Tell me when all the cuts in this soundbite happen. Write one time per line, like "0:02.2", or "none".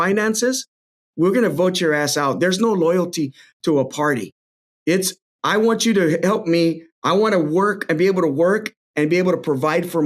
0:06.9